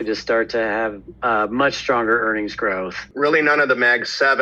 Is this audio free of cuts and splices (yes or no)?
no